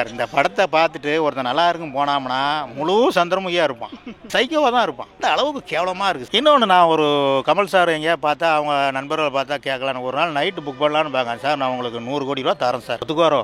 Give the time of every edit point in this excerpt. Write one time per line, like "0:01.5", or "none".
0:06.2